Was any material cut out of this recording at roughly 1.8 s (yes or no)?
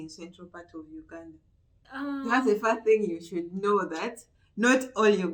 yes